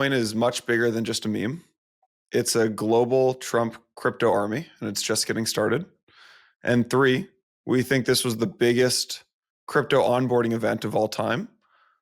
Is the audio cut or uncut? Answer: uncut